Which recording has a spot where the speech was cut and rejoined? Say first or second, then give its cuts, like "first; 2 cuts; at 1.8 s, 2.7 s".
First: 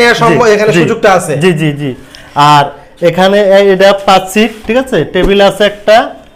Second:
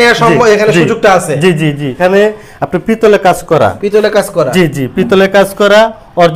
second; 1 cut; at 2.0 s